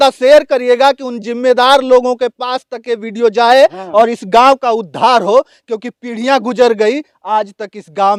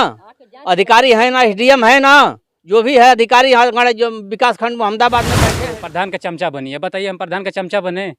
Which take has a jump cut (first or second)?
second